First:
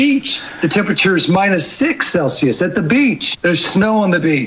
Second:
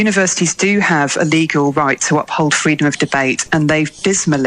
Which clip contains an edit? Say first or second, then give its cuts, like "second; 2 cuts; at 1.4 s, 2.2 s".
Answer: first; 1 cut; at 3.3 s